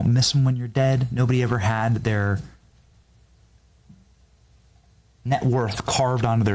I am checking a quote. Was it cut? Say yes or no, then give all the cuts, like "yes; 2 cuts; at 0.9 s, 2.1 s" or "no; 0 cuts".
no; 0 cuts